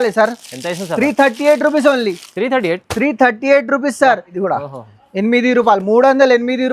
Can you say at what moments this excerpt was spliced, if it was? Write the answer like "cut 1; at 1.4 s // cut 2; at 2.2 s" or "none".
cut 1; at 4.3 s